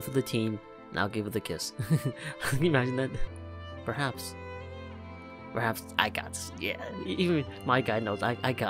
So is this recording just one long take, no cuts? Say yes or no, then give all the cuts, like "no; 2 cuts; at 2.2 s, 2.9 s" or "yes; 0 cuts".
no; 1 cut; at 3.2 s